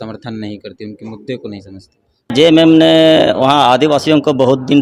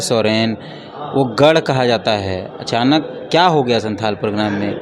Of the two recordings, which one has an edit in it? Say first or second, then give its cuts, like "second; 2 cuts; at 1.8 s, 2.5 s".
first; 1 cut; at 2.3 s